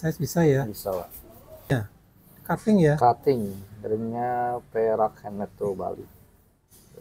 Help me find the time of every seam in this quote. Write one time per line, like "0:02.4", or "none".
0:01.7